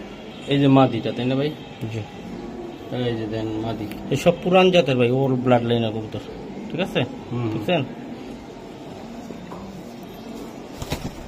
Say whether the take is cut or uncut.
uncut